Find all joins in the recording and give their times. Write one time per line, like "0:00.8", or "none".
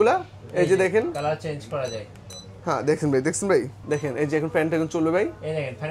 0:03.8